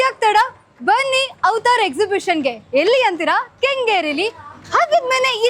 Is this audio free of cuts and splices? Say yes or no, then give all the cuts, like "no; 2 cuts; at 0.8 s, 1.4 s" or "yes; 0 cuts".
yes; 0 cuts